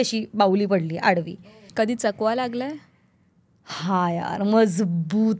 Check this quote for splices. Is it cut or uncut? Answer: cut